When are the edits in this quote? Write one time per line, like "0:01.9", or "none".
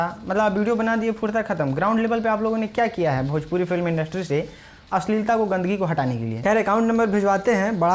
0:06.3